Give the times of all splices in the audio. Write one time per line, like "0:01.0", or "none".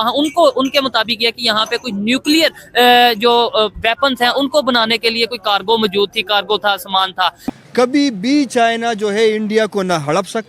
0:07.4